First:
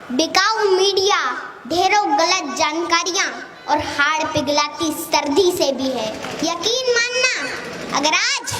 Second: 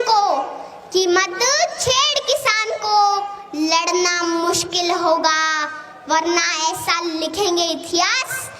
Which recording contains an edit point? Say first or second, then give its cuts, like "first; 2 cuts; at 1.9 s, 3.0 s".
first; 1 cut; at 6.2 s